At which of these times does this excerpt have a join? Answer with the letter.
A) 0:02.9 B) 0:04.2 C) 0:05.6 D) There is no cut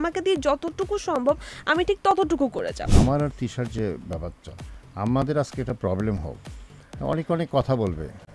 A